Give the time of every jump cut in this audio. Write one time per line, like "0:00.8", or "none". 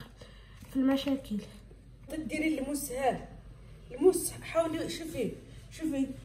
0:02.1